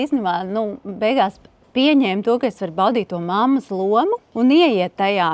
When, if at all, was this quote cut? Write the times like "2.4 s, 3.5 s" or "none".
4.3 s

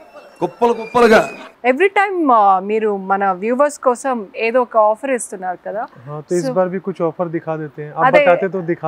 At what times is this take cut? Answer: 1.4 s

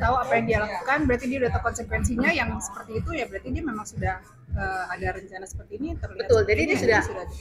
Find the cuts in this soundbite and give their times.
none

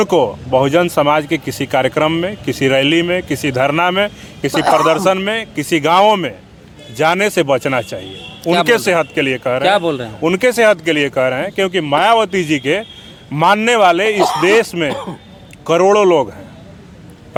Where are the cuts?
none

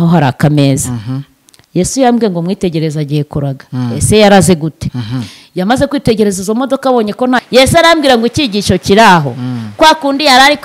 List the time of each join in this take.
7.4 s

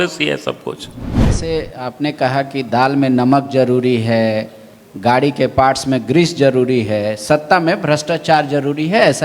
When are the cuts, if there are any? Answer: 1.4 s

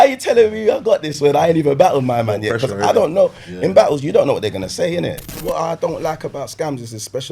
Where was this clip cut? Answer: 5.4 s

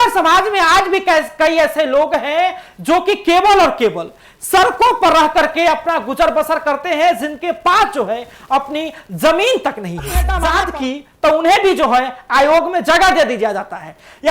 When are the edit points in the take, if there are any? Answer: 10.4 s

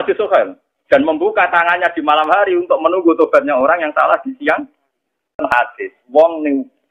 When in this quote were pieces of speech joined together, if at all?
5.4 s

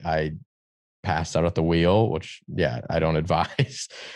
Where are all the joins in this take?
none

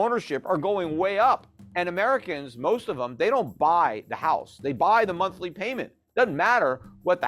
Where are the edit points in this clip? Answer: 1.6 s

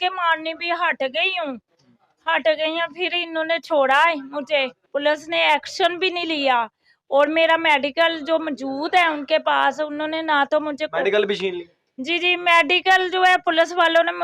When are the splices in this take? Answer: 4.8 s

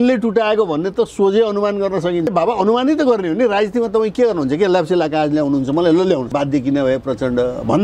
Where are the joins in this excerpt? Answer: 2.3 s, 6.3 s

